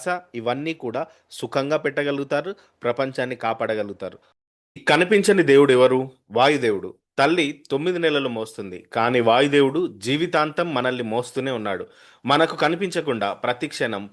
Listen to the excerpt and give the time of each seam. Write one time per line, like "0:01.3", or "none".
0:04.3